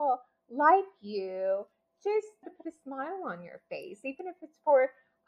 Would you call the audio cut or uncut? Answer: cut